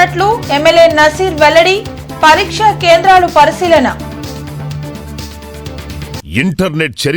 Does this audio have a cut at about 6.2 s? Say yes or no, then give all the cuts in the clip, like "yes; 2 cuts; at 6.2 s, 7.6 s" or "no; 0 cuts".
yes; 1 cut; at 6.2 s